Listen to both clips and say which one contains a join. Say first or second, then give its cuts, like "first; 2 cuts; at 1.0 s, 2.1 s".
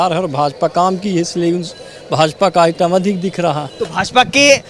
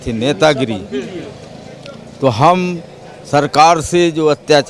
first; 1 cut; at 3.7 s